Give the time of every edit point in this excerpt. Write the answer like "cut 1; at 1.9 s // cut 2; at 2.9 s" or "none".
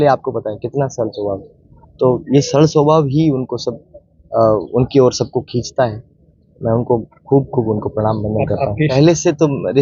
cut 1; at 8.9 s